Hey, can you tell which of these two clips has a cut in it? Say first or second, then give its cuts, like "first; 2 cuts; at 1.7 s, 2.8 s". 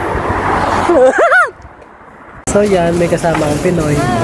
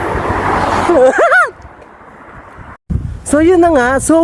first; 1 cut; at 2.5 s